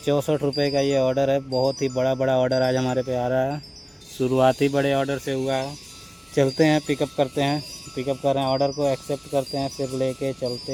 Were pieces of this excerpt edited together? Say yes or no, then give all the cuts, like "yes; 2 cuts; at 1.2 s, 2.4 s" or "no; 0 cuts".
no; 0 cuts